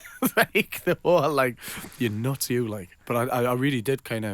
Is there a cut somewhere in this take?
yes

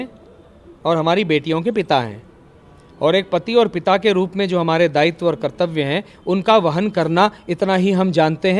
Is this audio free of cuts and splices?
yes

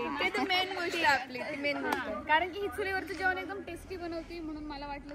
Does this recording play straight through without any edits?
yes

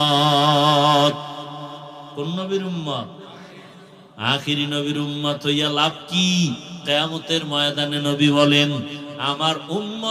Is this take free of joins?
yes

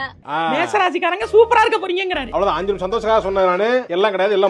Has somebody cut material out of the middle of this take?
no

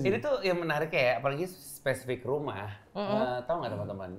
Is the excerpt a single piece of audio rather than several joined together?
yes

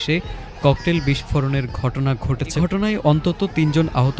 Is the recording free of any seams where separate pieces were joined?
no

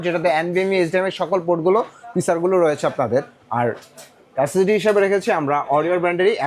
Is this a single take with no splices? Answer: yes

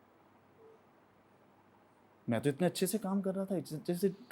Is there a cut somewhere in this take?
no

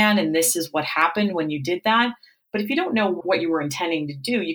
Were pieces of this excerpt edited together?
yes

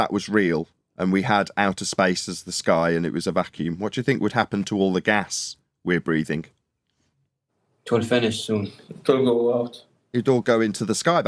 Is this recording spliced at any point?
no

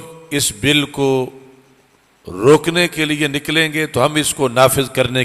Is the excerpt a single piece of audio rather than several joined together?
yes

